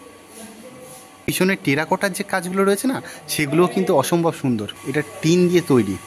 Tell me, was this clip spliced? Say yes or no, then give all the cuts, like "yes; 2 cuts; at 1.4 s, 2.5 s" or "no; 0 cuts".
yes; 2 cuts; at 1.3 s, 5.1 s